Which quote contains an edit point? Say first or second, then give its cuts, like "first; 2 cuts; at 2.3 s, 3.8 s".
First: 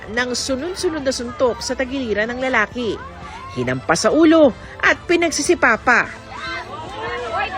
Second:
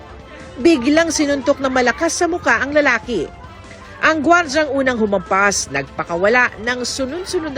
first; 2 cuts; at 2.0 s, 3.8 s